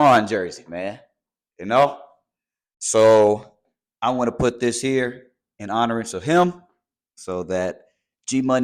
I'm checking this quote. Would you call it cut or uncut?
uncut